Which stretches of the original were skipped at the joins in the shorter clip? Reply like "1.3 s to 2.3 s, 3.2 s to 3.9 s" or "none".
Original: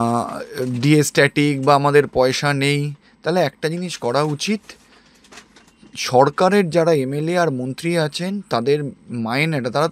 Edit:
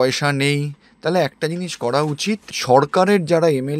4.7 s to 6.0 s